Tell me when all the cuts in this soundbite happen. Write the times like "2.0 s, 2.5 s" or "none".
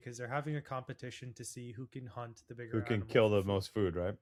none